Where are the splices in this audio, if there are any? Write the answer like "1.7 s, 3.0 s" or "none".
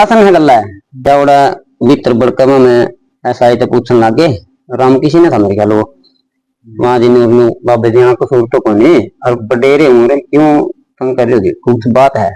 1.0 s